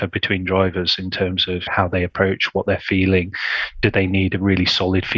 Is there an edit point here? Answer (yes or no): yes